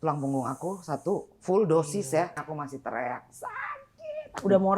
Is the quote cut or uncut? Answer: cut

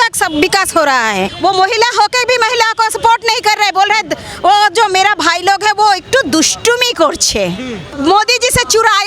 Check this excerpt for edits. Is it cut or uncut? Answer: cut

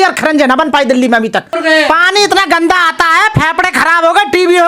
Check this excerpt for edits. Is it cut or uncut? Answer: cut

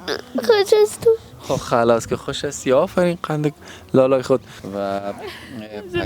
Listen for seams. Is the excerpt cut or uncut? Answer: cut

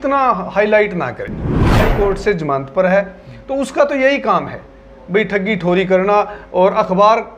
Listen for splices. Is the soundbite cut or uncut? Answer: cut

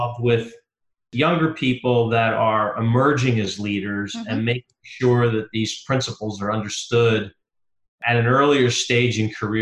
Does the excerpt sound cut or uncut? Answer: uncut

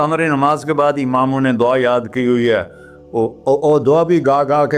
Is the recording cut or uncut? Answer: uncut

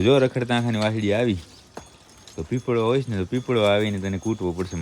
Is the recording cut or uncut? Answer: uncut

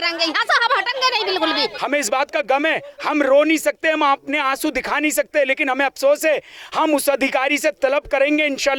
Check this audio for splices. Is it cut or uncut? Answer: cut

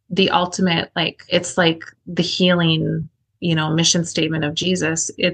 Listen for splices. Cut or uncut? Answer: cut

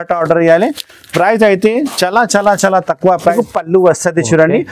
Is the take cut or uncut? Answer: cut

